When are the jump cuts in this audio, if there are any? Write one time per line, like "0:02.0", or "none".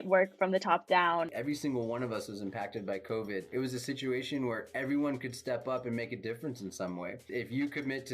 0:01.3
0:03.5
0:07.3